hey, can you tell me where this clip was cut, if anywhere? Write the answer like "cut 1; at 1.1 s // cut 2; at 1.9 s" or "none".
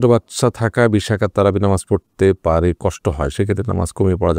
none